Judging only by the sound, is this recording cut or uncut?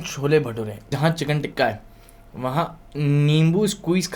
cut